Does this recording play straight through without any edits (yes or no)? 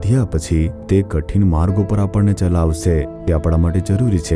no